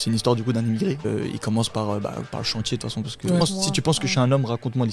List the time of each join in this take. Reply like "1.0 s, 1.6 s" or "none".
1.1 s, 3.4 s